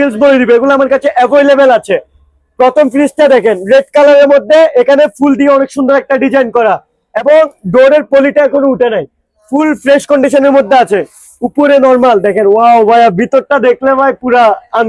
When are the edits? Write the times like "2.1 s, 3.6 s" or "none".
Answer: none